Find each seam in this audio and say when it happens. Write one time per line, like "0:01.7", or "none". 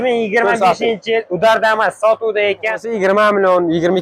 0:02.9

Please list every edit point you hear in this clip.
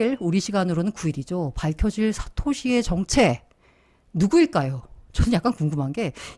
none

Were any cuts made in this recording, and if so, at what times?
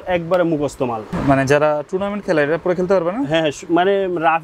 0:01.2

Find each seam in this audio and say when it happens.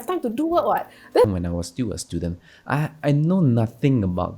0:01.3

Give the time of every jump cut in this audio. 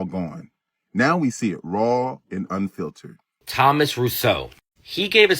0:03.4

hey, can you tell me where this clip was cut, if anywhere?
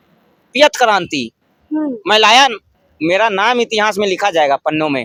none

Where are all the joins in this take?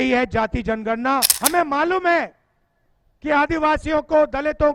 0:01.3

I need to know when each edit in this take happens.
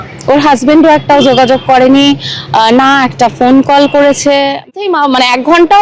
0:04.7

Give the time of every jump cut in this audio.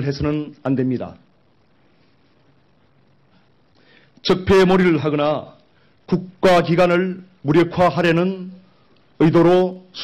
none

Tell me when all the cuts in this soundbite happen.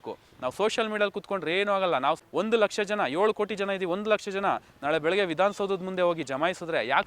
0:02.2

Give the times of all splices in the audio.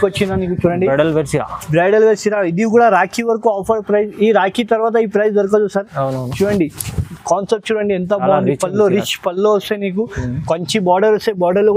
none

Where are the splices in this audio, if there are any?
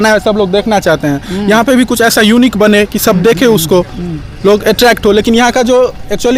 none

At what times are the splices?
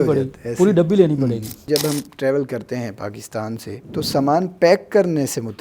0:01.6
0:03.8

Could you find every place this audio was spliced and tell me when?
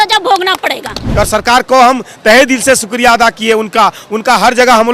0:01.0

